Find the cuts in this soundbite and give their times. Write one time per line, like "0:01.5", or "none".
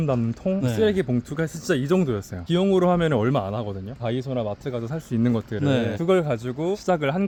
none

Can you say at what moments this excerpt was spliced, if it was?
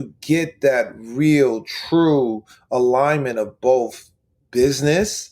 none

